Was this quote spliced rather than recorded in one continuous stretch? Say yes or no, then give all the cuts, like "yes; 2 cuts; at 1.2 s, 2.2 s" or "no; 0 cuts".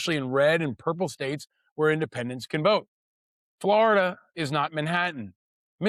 no; 0 cuts